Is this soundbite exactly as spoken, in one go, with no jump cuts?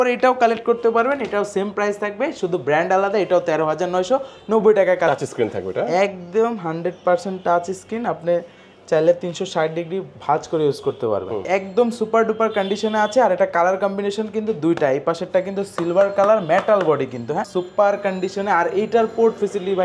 no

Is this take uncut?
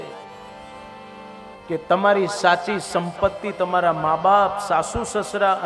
yes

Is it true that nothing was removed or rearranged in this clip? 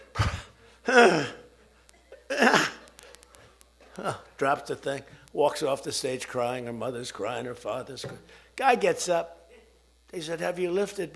yes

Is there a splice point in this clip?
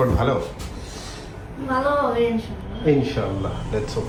no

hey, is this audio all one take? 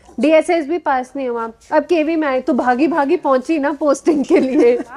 yes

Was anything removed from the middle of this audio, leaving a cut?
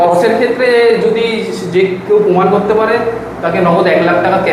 no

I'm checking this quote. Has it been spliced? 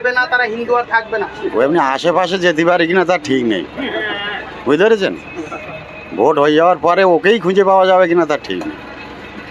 no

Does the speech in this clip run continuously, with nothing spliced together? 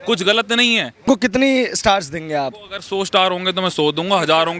no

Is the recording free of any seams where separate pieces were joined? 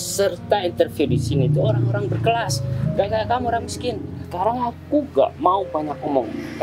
no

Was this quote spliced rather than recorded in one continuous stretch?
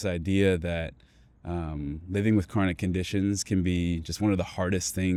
no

